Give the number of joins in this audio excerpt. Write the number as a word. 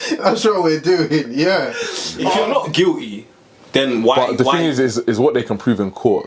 one